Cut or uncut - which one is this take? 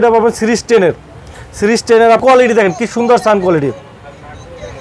cut